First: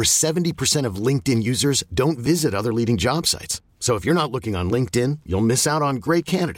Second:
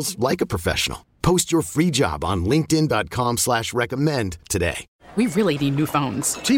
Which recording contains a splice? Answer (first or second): second